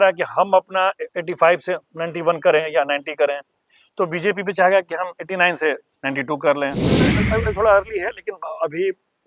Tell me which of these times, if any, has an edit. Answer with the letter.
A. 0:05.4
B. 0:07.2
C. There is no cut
B